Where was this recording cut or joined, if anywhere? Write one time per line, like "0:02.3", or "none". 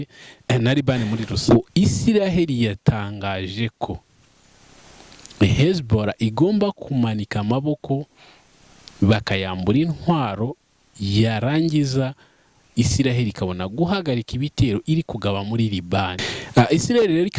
0:01.3
0:16.3